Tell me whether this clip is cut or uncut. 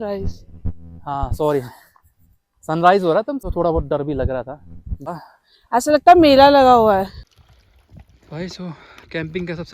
cut